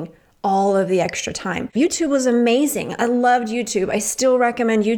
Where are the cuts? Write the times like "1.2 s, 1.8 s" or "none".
1.7 s